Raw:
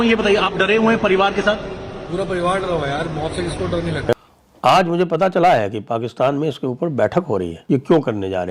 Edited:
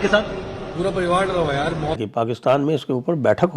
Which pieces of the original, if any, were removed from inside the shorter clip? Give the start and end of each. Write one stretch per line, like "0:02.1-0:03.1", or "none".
0:03.3-0:05.7